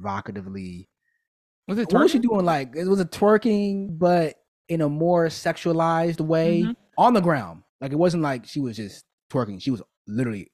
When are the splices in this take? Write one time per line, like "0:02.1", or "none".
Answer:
0:03.9